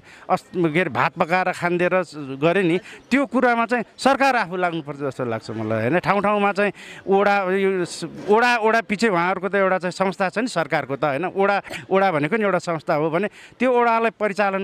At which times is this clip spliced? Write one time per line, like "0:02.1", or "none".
none